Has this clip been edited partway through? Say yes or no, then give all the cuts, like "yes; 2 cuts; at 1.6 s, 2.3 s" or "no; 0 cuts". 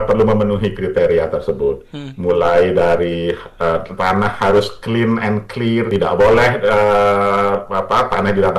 yes; 1 cut; at 5.9 s